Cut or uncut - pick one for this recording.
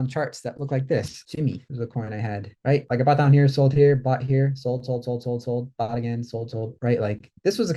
cut